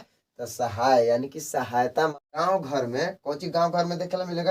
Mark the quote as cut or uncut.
cut